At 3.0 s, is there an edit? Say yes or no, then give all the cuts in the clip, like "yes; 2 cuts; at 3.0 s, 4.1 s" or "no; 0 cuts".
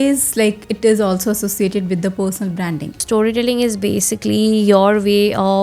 yes; 1 cut; at 3.0 s